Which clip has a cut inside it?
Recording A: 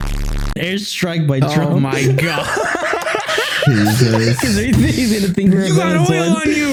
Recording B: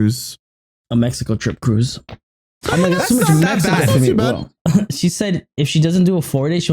B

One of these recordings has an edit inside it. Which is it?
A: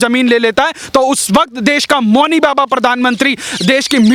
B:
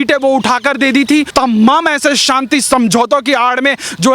B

